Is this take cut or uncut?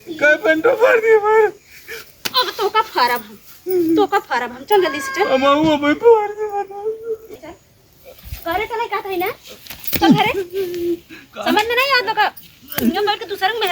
cut